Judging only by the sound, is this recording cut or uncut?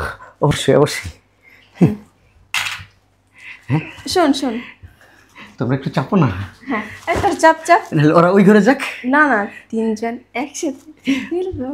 uncut